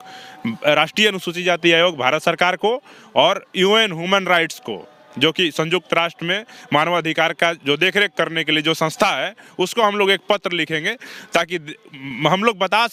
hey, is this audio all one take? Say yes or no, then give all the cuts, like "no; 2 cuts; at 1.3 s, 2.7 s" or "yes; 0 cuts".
yes; 0 cuts